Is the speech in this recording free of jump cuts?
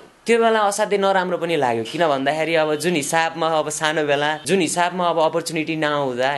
no; 1 cut; at 4.4 s

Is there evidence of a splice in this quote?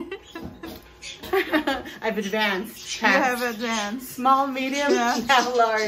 no; 0 cuts

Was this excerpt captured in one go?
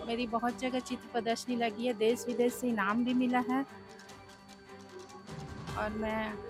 yes; 0 cuts

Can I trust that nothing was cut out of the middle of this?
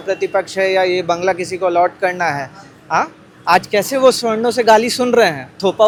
yes; 0 cuts

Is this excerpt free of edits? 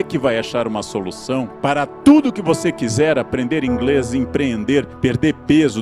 no; 2 cuts; at 1.5 s, 4.9 s

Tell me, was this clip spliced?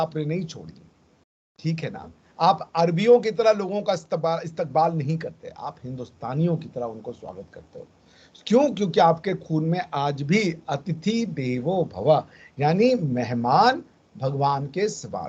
no; 0 cuts

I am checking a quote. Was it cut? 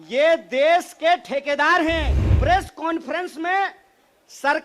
yes; 1 cut; at 2.2 s

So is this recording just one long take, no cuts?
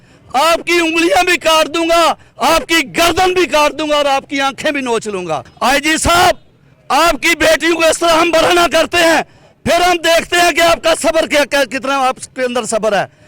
no; 1 cut; at 5.5 s

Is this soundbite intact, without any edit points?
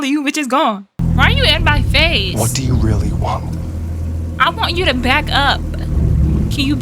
no; 1 cut; at 1.0 s

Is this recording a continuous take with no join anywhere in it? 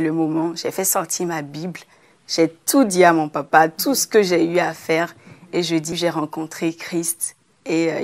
no; 1 cut; at 5.9 s

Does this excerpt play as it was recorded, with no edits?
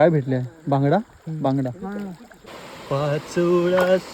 no; 1 cut; at 2.3 s

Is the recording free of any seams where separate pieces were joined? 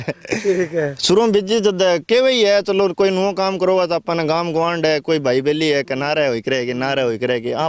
yes; 0 cuts

